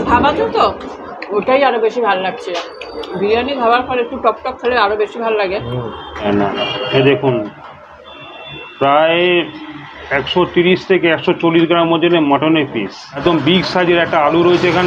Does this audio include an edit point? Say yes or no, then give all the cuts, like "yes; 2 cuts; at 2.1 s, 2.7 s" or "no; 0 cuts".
yes; 2 cuts; at 6.2 s, 13.2 s